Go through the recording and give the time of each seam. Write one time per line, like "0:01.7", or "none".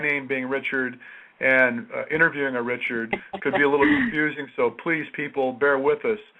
0:05.4